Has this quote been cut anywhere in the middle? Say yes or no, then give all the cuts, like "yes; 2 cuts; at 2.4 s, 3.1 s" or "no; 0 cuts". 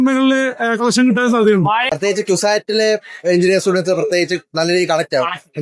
yes; 1 cut; at 1.9 s